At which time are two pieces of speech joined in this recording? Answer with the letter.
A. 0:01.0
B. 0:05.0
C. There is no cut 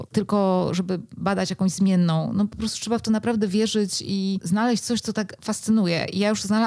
C